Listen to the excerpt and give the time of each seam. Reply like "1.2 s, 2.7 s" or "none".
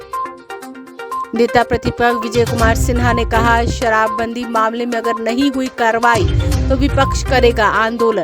1.1 s